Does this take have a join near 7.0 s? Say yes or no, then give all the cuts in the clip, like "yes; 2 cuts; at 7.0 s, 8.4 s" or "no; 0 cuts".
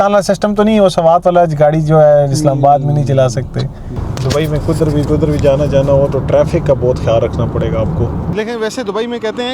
no; 2 cuts; at 4.0 s, 8.3 s